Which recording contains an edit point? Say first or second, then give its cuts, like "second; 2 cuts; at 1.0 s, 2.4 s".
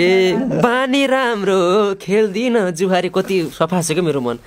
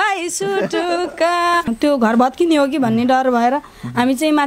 second; 1 cut; at 1.7 s